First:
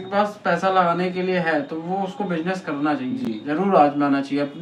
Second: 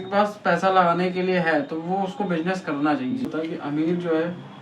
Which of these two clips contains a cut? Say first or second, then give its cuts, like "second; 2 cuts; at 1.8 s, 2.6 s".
second; 1 cut; at 3.3 s